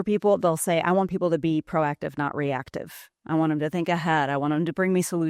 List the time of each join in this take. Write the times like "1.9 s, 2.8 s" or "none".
none